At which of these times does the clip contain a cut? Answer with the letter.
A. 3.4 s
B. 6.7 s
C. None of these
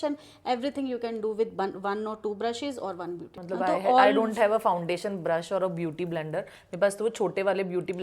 A